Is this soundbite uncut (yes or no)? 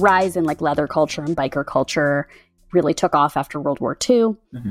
yes